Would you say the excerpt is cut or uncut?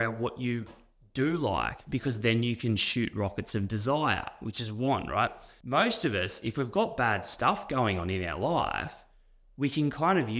cut